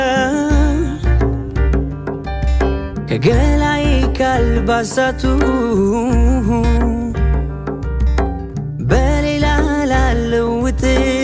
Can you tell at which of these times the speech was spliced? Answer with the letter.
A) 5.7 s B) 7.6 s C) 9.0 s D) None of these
D